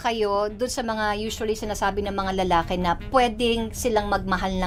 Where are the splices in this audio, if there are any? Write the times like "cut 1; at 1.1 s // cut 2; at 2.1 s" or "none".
none